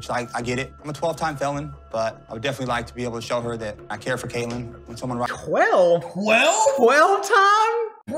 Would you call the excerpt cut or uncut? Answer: uncut